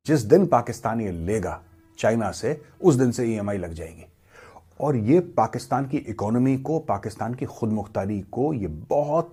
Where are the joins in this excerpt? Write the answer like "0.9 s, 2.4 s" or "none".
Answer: none